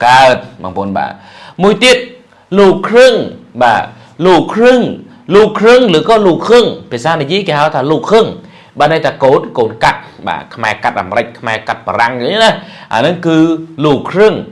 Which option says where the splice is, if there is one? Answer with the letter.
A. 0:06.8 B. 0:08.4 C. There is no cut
C